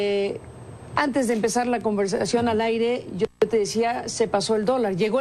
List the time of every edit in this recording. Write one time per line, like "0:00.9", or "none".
none